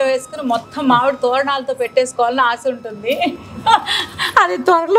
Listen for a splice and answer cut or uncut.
uncut